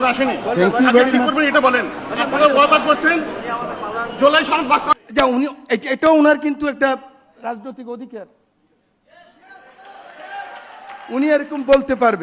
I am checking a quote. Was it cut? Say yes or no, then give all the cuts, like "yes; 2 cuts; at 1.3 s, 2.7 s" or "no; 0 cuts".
yes; 1 cut; at 5.1 s